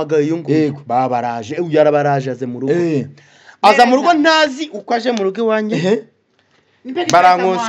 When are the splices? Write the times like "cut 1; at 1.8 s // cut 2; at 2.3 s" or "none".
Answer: none